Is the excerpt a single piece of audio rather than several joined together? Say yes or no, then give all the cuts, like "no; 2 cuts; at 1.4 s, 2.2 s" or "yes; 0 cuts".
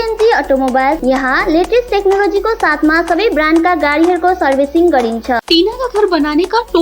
no; 2 cuts; at 1.0 s, 5.4 s